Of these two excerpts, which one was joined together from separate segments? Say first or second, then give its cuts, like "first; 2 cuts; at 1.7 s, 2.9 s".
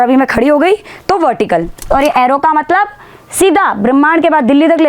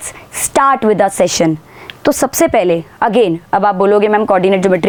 first; 1 cut; at 1.9 s